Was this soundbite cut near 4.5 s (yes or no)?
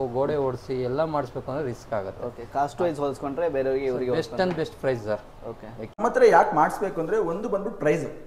no